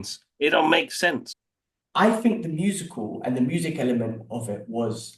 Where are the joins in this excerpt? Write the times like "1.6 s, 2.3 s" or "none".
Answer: 1.3 s